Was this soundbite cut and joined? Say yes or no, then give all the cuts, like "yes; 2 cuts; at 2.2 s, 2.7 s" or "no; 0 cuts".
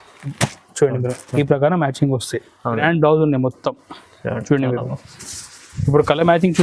yes; 1 cut; at 2.8 s